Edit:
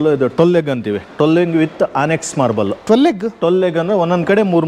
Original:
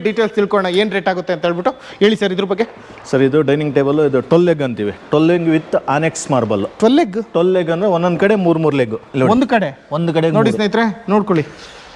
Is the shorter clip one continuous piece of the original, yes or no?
yes